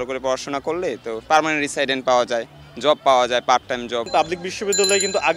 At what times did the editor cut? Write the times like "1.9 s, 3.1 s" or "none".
4.0 s